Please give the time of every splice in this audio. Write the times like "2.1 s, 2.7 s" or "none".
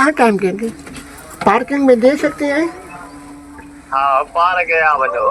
none